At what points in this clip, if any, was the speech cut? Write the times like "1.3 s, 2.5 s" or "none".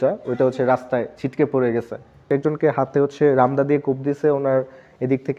2.3 s